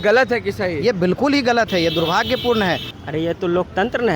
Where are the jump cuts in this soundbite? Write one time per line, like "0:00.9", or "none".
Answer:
0:02.9

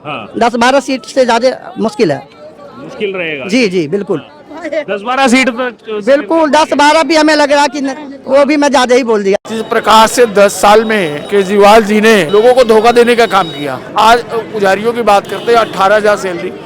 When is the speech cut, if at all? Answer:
0:09.5
0:11.2
0:12.3
0:13.9

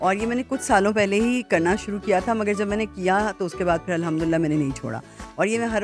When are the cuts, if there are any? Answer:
none

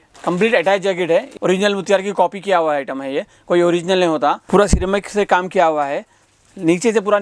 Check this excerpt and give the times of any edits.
0:01.3
0:04.4

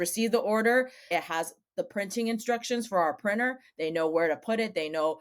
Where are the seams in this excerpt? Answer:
0:01.1

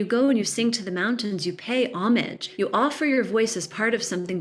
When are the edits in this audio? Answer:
0:02.4

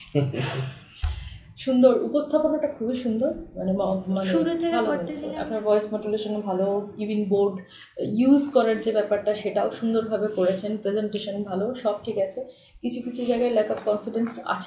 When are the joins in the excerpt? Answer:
0:04.9

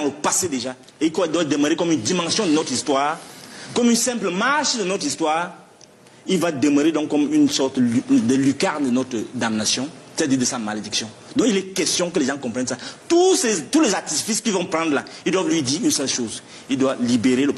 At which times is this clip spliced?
none

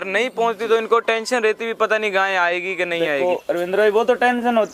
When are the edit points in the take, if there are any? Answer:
none

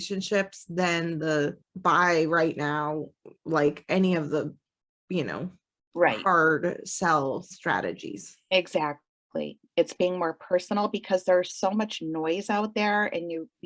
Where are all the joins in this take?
0:01.7

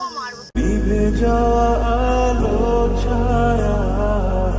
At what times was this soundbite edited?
none

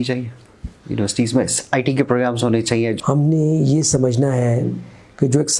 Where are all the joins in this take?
0:03.0

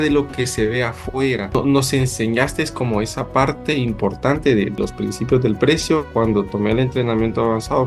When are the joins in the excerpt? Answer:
0:01.6
0:04.7
0:06.1

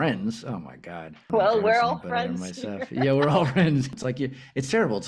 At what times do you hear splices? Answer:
0:01.3
0:03.9

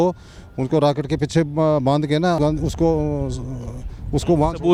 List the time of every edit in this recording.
none

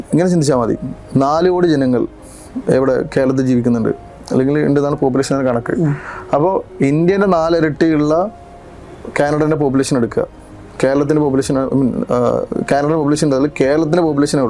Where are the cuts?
none

